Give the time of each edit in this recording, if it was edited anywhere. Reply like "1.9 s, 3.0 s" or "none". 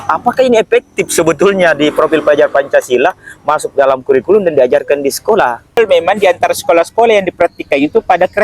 5.8 s